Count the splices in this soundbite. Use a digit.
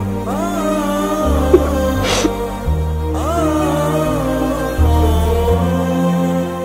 0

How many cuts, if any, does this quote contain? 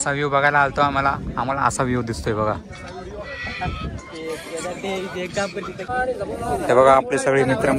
0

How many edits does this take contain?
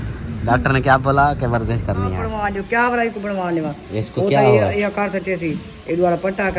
1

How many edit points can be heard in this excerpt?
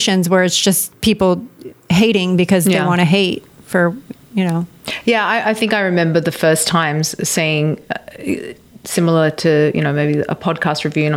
1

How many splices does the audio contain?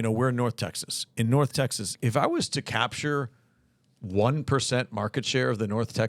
1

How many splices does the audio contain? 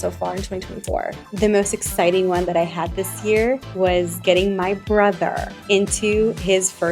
3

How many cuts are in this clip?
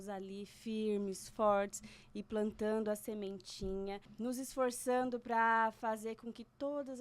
1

